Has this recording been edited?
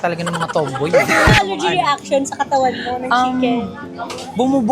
yes; 1 cut; at 1.3 s

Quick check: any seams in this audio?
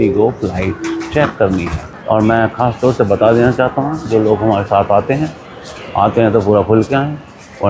no; 0 cuts

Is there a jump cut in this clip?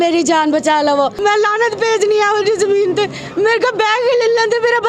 yes; 1 cut; at 0.9 s

